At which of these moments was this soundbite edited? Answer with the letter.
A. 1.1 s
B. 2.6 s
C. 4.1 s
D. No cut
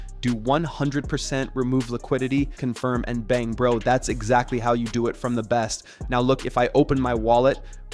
B